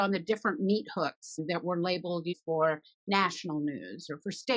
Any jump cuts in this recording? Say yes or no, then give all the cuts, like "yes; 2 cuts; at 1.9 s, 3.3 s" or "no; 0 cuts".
no; 0 cuts